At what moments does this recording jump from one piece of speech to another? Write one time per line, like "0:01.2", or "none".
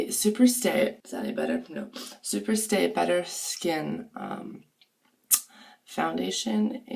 0:01.0